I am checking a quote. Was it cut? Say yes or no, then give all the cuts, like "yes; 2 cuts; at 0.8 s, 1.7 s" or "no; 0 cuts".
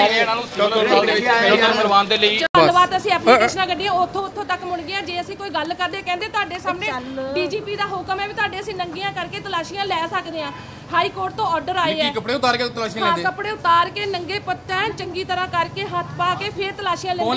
no; 0 cuts